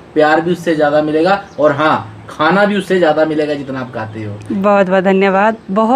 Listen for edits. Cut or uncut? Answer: uncut